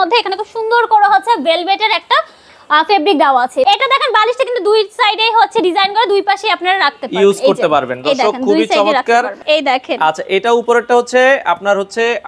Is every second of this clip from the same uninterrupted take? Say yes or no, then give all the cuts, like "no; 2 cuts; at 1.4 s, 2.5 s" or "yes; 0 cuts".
no; 2 cuts; at 3.7 s, 9.4 s